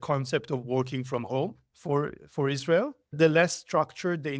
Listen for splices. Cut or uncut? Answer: cut